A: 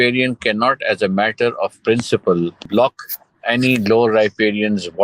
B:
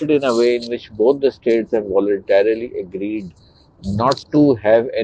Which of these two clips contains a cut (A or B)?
A